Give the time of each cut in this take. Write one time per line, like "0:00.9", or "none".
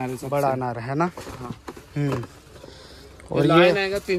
none